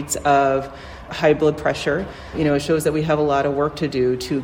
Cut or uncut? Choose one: cut